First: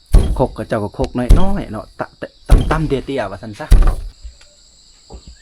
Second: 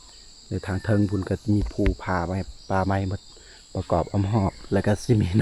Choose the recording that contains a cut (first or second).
first